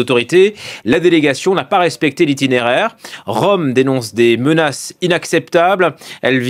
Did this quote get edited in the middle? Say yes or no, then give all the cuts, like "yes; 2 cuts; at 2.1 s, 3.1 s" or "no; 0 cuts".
yes; 1 cut; at 3.8 s